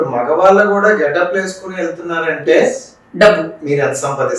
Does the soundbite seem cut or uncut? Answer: uncut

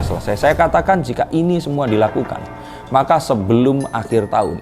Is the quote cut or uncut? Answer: uncut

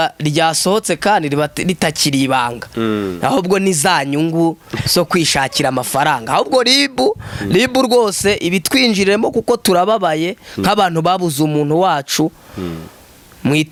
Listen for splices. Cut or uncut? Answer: uncut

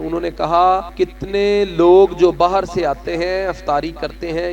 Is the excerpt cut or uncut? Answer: cut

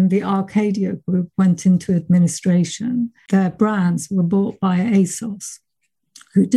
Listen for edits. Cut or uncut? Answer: cut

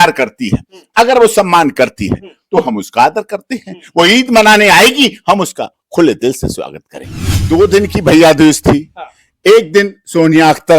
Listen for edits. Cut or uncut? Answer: cut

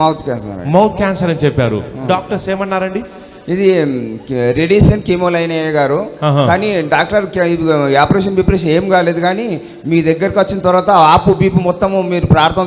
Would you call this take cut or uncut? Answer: uncut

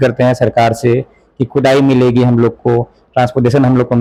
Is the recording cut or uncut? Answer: uncut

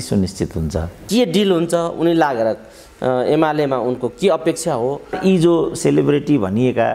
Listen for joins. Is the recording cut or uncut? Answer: cut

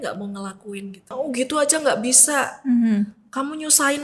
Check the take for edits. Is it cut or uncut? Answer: cut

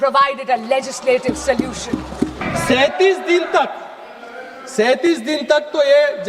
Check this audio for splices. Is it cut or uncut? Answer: cut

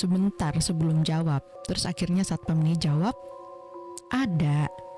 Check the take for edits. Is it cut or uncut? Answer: cut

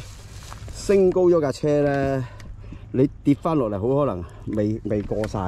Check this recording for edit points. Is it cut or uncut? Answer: uncut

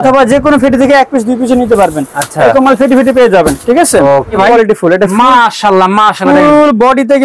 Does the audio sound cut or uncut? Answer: cut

